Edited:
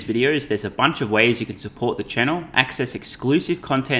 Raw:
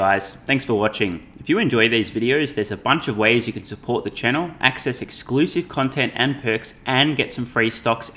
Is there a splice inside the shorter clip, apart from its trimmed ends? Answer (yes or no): no